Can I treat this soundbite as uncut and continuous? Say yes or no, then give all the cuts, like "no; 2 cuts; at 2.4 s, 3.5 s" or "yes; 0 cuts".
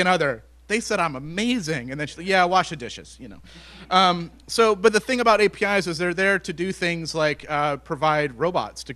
no; 1 cut; at 1.3 s